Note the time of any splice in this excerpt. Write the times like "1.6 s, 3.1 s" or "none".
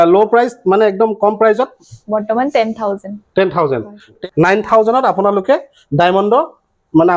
4.1 s